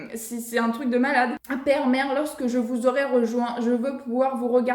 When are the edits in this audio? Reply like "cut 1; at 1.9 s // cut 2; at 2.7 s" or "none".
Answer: cut 1; at 1.4 s